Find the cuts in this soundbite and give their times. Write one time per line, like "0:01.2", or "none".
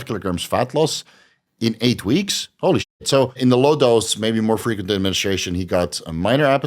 0:03.4

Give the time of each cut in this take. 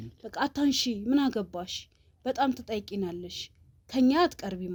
none

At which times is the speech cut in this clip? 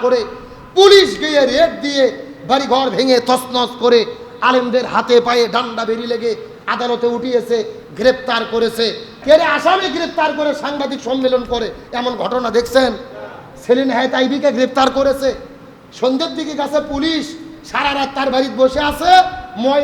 0:09.1

